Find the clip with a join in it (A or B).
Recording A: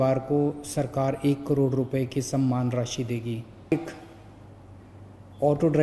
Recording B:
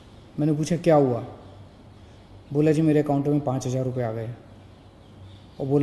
A